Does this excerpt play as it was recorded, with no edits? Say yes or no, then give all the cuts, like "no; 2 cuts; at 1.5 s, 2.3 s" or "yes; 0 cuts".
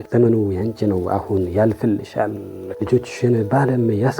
no; 1 cut; at 2.7 s